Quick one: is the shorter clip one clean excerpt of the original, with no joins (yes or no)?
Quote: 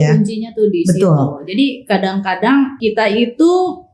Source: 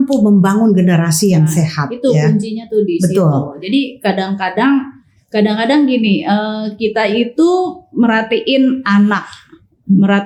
no